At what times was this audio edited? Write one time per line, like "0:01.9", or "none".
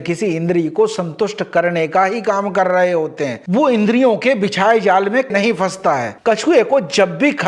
0:03.4
0:06.1